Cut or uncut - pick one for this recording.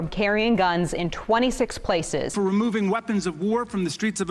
cut